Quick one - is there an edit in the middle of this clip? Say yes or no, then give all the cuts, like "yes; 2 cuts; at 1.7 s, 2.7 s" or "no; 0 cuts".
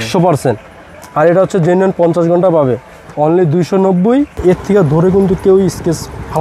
yes; 1 cut; at 4.3 s